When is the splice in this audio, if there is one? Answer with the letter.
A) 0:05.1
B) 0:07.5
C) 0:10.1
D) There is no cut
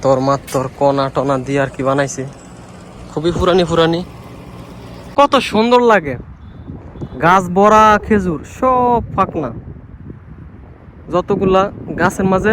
A